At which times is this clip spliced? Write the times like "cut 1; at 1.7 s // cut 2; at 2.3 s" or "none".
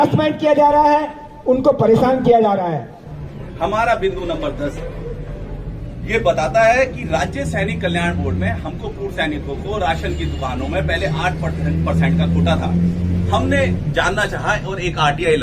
cut 1; at 3.0 s